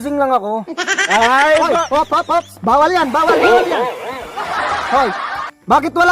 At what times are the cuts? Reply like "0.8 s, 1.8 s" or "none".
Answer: none